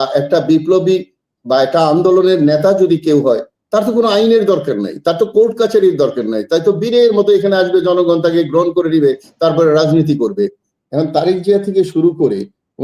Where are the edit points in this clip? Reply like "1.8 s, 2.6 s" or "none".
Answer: 10.7 s